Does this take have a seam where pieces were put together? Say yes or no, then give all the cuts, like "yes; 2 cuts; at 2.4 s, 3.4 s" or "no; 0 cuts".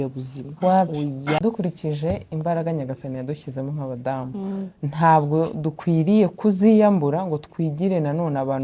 yes; 1 cut; at 1.4 s